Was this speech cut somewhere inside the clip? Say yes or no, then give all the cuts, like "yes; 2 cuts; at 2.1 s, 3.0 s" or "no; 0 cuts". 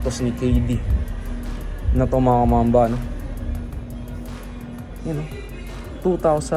no; 0 cuts